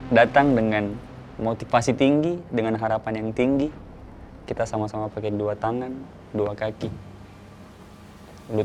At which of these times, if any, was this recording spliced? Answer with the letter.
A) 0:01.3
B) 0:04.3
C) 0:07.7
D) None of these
D